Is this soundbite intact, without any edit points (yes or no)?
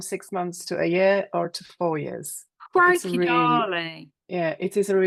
yes